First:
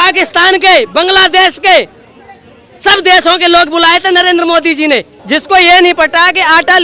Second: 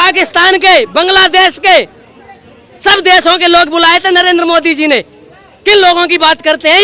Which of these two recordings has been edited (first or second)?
first